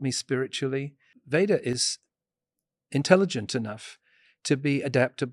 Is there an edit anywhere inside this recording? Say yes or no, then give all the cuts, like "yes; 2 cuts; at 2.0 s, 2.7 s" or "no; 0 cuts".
yes; 1 cut; at 1.1 s